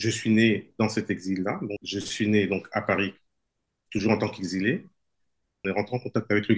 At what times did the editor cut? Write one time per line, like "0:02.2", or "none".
0:01.8
0:05.5